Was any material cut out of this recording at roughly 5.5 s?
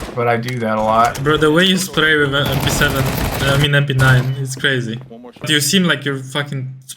yes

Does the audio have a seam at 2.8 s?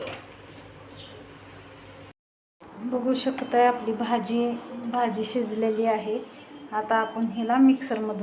yes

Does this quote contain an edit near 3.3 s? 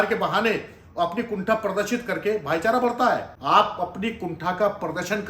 yes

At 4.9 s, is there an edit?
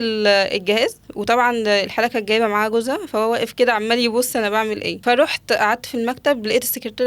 yes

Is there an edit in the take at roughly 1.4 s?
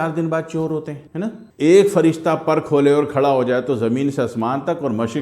yes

